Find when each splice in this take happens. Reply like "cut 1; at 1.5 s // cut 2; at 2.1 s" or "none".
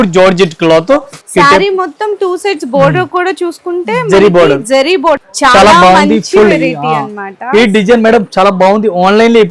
cut 1; at 1.2 s // cut 2; at 5.2 s